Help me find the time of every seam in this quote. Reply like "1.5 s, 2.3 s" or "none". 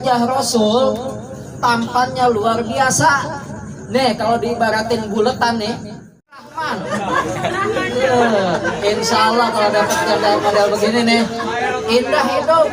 6.5 s

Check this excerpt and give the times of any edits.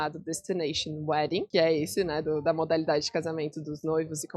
1.5 s

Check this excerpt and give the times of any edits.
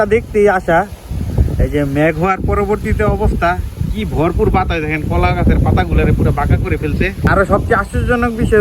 7.3 s

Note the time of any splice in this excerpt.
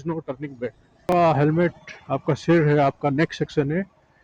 1.0 s

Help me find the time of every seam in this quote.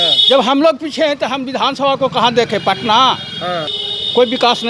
3.7 s

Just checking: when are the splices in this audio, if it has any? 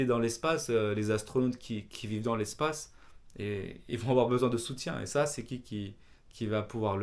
none

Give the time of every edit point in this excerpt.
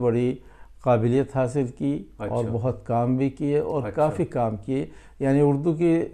none

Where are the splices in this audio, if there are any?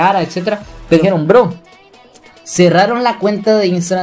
1.0 s

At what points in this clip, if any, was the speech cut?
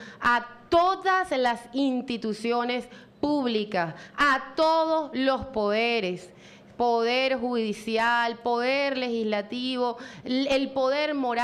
7.1 s

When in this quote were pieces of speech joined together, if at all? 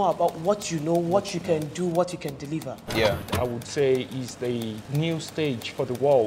3.3 s, 4.8 s

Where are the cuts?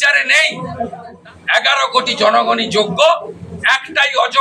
1.0 s

